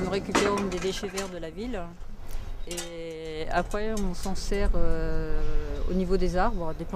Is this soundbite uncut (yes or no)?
yes